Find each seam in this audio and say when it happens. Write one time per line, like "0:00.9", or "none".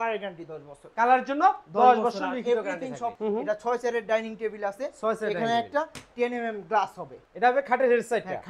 0:03.2
0:07.1